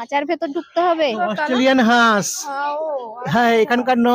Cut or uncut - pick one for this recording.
cut